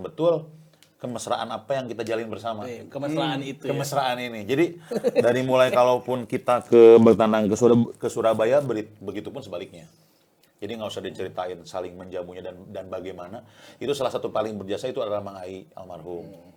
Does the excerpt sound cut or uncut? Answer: uncut